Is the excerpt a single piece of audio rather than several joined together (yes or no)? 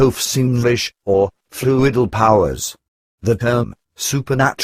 no